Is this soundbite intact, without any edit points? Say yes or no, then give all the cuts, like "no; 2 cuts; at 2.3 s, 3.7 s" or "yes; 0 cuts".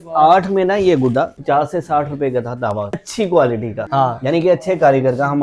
no; 3 cuts; at 1.4 s, 3.0 s, 3.8 s